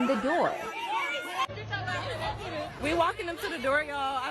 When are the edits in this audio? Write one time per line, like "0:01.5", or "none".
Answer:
0:01.5

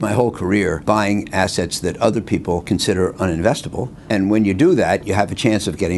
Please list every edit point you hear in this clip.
0:00.8
0:02.6
0:03.9

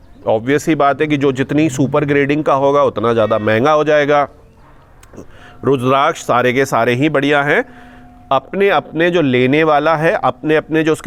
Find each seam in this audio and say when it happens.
none

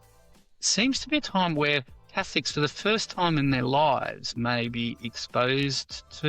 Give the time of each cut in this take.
none

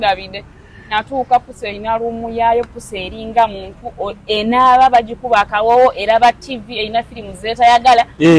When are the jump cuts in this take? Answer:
none

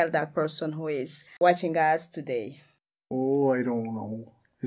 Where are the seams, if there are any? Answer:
0:01.2

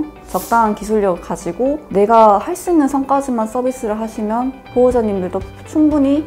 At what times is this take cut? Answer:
0:01.8

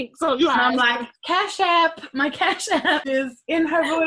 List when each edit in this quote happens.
0:03.0

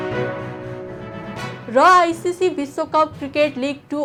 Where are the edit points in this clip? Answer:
none

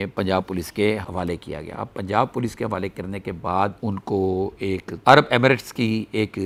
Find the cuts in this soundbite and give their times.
none

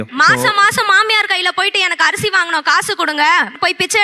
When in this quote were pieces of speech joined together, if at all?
none

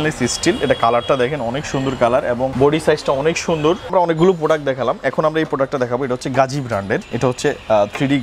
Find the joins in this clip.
0:02.5
0:03.9
0:07.1

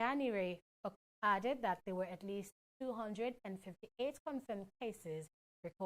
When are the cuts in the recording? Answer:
none

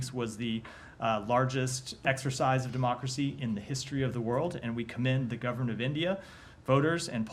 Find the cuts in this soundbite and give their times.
none

